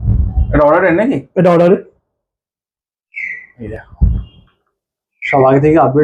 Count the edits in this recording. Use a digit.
1